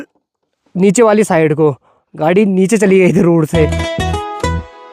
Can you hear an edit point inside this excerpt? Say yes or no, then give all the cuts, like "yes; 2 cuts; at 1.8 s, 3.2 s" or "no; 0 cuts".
yes; 1 cut; at 3.8 s